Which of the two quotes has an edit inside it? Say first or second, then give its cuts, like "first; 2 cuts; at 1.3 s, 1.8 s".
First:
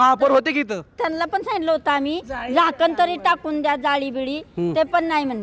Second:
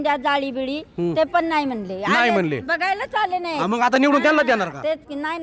first; 1 cut; at 0.9 s